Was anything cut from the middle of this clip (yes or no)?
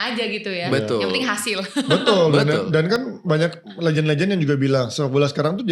no